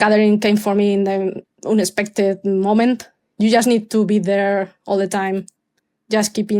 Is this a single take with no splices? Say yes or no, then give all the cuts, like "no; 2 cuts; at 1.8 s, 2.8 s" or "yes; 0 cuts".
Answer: no; 1 cut; at 1.5 s